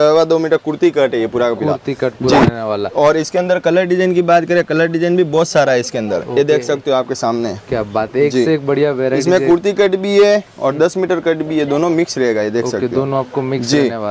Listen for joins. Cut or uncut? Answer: uncut